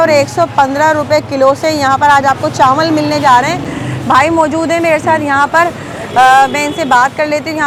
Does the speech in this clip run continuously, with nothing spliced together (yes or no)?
yes